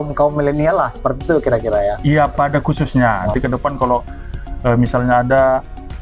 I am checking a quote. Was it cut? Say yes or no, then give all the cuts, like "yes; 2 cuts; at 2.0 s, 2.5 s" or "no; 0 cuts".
yes; 1 cut; at 3.3 s